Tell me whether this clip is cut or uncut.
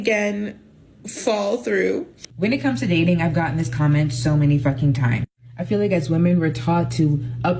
cut